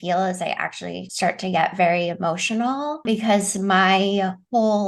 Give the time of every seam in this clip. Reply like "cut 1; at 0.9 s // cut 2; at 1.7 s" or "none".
cut 1; at 1.0 s // cut 2; at 3.0 s